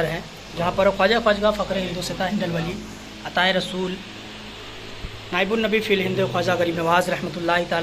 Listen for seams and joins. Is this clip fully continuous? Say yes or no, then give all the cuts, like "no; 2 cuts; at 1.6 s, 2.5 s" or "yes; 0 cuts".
yes; 0 cuts